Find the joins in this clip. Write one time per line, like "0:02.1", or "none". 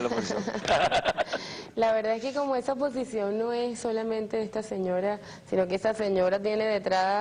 0:04.7